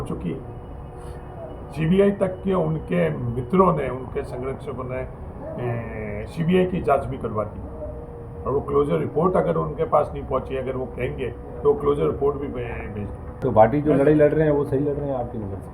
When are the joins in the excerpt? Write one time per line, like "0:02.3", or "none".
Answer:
0:13.4